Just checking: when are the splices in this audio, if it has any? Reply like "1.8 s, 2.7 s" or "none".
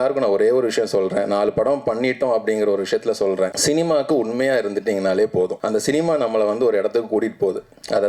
3.6 s, 5.6 s